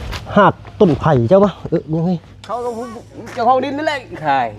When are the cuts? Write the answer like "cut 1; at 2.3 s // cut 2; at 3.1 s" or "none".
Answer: cut 1; at 2.7 s